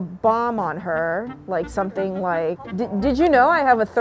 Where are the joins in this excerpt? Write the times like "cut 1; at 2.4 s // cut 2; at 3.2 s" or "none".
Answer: cut 1; at 2.6 s